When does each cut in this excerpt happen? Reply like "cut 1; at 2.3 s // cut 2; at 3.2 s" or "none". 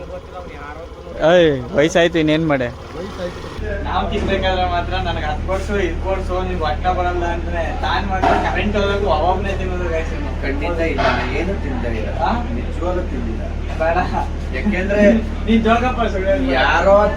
cut 1; at 3.5 s

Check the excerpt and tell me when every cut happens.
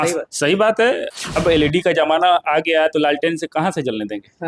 cut 1; at 1.1 s

